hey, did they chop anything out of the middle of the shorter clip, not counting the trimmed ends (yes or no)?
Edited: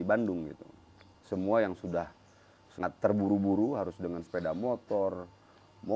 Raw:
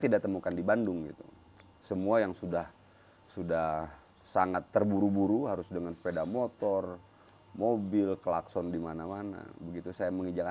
yes